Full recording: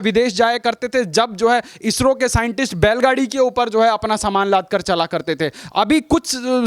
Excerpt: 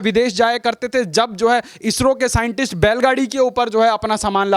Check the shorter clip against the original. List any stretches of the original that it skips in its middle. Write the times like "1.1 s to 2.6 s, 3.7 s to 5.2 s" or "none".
none